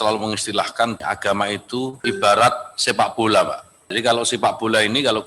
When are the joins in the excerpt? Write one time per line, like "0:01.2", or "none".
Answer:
0:01.0
0:02.0
0:03.9